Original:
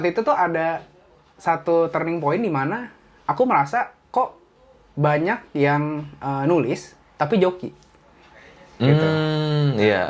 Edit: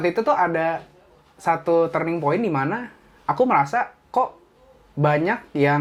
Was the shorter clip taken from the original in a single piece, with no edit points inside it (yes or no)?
yes